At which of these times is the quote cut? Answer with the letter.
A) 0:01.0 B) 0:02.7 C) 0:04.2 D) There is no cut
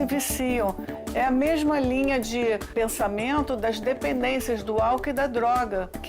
B